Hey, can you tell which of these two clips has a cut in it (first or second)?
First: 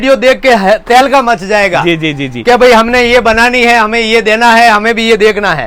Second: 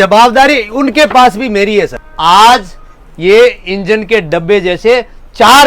second